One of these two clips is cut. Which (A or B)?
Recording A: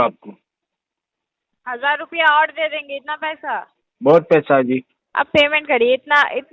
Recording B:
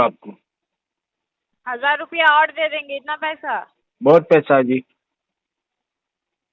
A